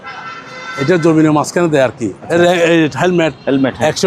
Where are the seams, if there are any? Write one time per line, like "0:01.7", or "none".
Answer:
0:02.1